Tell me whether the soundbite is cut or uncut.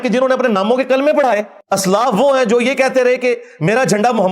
cut